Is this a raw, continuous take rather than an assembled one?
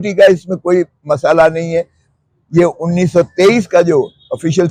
yes; 0 cuts

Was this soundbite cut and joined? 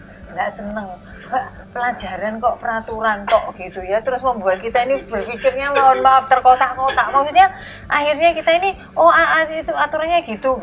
no; 0 cuts

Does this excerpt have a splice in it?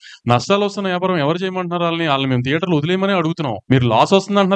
yes; 1 cut; at 3.5 s

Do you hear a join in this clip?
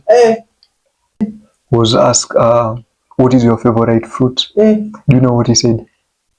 yes; 1 cut; at 1.3 s

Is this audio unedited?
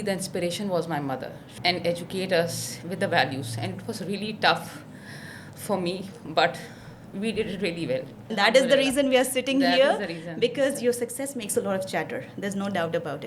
no; 2 cuts; at 1.5 s, 8.2 s

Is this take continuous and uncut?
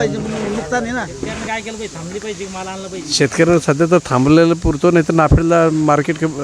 no; 1 cut; at 1.4 s

